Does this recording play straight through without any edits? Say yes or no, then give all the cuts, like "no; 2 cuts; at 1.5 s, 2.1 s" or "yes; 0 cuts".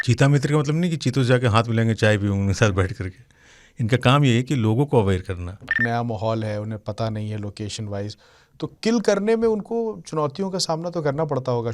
no; 1 cut; at 5.8 s